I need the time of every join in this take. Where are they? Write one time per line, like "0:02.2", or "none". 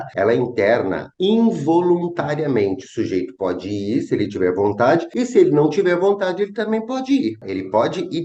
none